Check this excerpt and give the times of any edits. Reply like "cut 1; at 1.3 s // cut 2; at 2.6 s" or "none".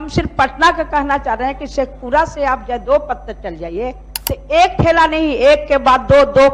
none